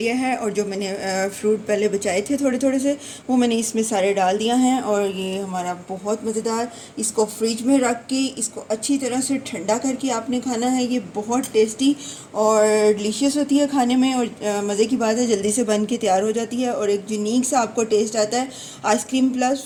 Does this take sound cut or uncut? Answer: uncut